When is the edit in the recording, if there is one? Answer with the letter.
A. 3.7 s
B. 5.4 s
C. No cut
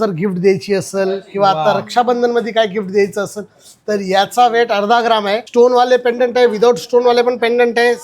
B